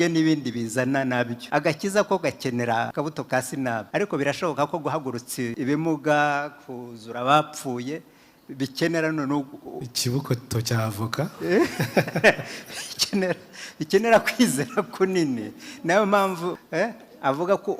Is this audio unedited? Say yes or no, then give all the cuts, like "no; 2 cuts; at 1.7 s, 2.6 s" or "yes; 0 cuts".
no; 5 cuts; at 1.4 s, 2.9 s, 3.9 s, 5.5 s, 16.6 s